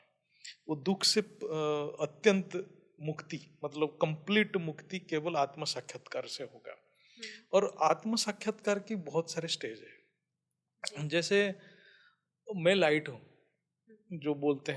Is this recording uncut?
yes; 0 cuts

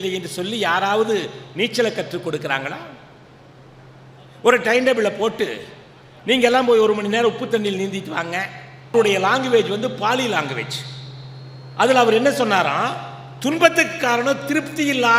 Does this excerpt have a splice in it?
yes; 1 cut; at 8.9 s

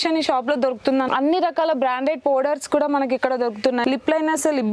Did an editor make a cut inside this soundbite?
yes; 2 cuts; at 1.1 s, 3.8 s

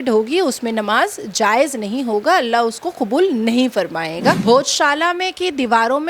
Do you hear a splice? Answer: yes; 1 cut; at 4.4 s

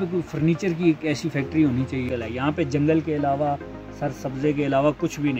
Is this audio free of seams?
no; 1 cut; at 2.0 s

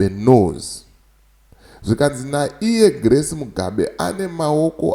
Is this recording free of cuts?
yes; 0 cuts

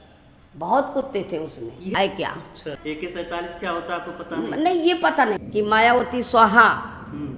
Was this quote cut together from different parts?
yes; 3 cuts; at 1.9 s, 2.8 s, 5.0 s

